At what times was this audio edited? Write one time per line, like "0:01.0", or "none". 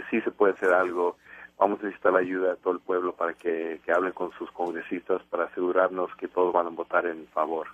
0:04.3